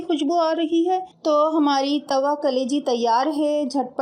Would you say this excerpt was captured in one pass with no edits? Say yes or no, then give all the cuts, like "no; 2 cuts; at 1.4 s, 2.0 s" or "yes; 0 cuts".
yes; 0 cuts